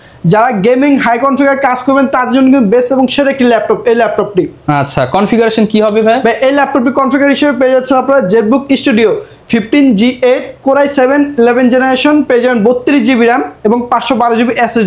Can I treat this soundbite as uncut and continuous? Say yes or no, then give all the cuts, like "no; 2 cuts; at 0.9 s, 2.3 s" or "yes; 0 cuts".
yes; 0 cuts